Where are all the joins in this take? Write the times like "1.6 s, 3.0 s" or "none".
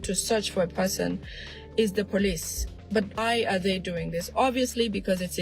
3.2 s